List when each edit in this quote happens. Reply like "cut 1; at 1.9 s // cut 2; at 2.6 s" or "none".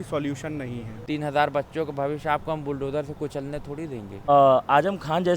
cut 1; at 0.9 s // cut 2; at 4.3 s